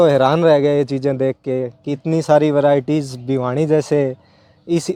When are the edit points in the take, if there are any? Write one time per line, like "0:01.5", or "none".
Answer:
none